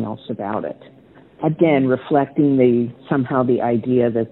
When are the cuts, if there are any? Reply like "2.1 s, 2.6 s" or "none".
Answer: none

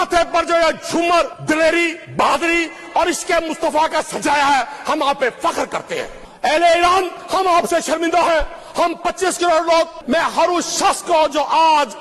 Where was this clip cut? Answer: 1.4 s, 2.0 s, 6.2 s, 7.2 s, 8.6 s, 10.0 s

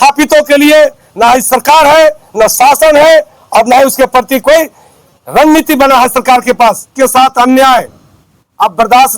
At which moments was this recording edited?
7.3 s

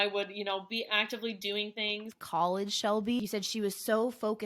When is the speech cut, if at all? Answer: 2.2 s, 3.2 s

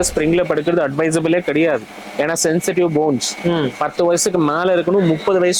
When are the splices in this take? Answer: none

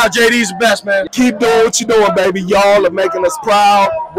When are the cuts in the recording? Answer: 1.1 s

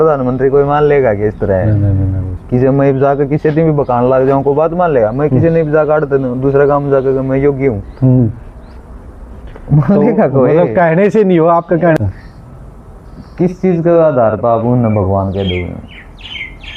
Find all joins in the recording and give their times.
12.0 s

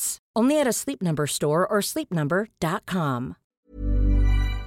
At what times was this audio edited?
3.5 s

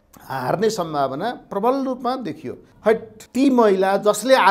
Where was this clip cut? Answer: 2.8 s

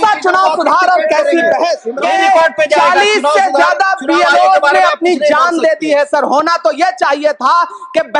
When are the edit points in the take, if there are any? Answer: 1.9 s

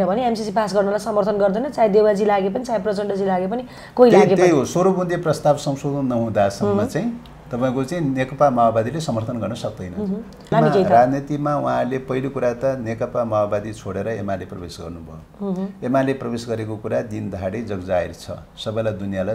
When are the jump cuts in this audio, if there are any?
10.5 s

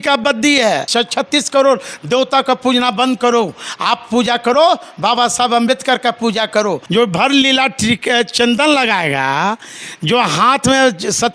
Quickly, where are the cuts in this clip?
0.9 s, 6.8 s

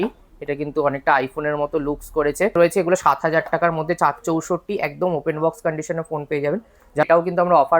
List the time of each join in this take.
2.5 s, 7.0 s

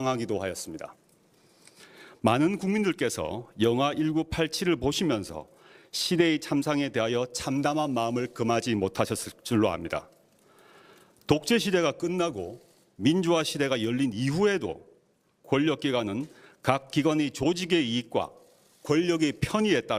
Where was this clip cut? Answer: 16.6 s

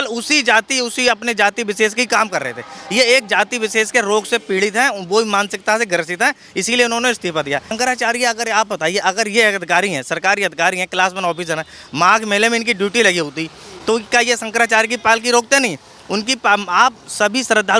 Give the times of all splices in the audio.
7.7 s

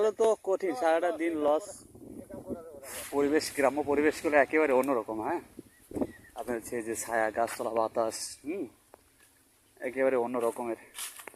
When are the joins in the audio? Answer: 3.0 s

